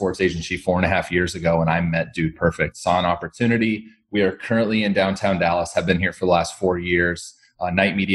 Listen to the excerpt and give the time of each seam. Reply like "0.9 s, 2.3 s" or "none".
none